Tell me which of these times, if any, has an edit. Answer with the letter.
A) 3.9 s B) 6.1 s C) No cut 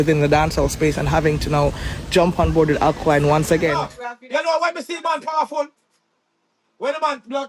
A